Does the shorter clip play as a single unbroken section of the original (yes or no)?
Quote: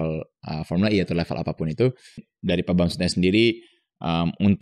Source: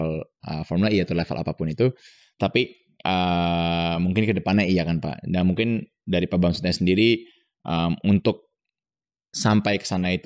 no